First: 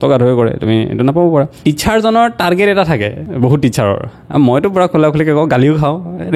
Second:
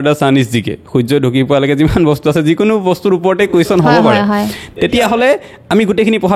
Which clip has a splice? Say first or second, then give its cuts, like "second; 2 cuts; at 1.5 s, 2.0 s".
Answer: first; 2 cuts; at 1.5 s, 3.2 s